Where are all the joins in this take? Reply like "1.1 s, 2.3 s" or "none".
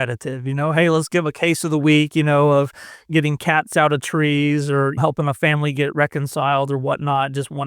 5.0 s

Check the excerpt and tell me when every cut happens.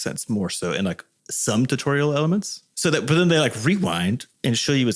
2.6 s

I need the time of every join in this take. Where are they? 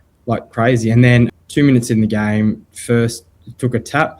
1.3 s

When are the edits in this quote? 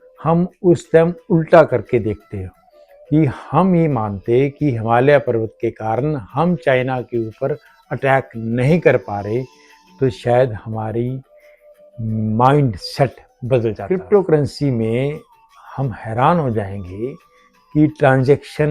13.8 s

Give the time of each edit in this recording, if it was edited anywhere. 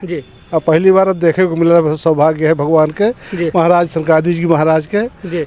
none

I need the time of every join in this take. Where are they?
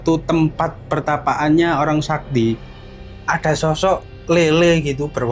2.8 s

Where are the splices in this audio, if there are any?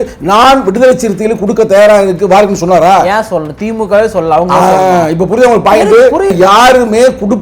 6.3 s

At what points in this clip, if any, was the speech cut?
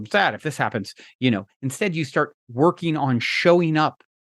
2.4 s

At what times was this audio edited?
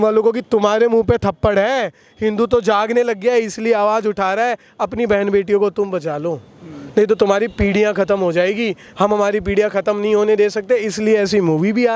none

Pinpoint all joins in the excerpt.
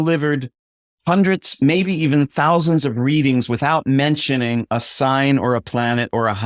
none

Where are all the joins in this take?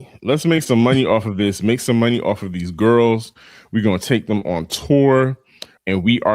none

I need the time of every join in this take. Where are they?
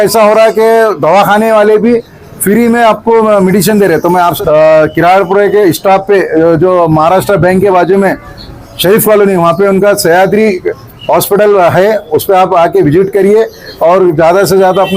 4.4 s

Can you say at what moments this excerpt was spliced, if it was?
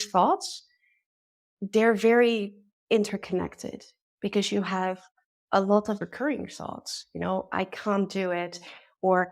6.0 s

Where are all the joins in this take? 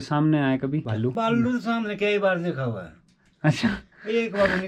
1.0 s

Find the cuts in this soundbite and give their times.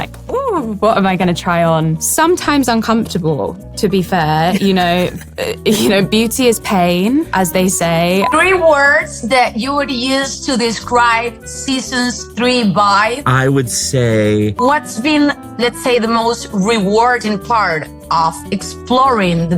2.0 s, 8.3 s, 14.6 s

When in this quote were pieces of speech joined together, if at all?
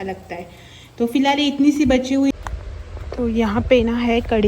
2.4 s

